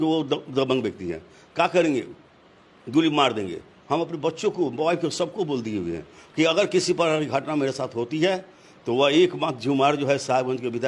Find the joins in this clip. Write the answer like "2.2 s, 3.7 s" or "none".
none